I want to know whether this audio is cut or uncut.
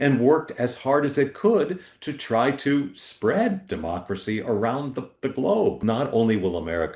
cut